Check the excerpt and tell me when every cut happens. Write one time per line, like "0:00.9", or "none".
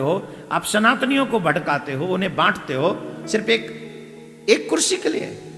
none